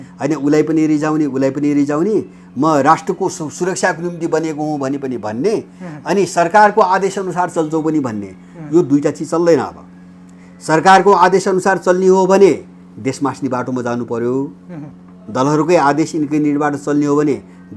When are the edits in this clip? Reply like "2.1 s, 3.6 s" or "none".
none